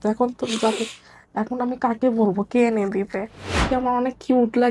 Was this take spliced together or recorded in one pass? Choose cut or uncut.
cut